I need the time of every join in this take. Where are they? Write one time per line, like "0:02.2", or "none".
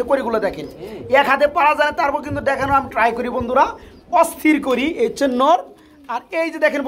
none